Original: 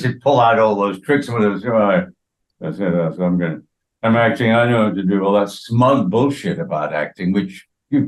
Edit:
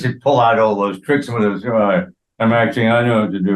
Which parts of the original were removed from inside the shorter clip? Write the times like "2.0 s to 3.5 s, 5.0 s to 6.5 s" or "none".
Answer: 2.2 s to 3.8 s